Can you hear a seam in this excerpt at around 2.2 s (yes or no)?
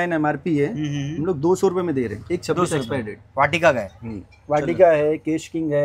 no